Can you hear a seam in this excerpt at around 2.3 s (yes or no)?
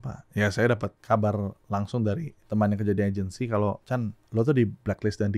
yes